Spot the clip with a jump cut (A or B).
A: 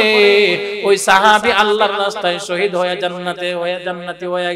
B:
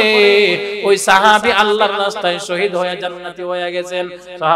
B